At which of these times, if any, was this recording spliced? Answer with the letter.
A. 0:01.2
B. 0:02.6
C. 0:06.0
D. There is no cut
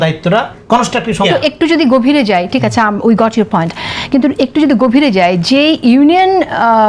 A